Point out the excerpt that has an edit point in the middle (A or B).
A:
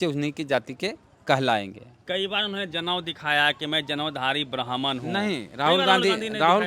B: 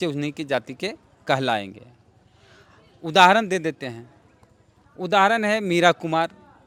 A